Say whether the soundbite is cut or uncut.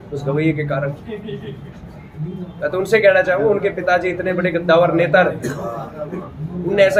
uncut